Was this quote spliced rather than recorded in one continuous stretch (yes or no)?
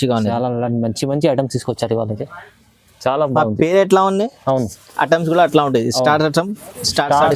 no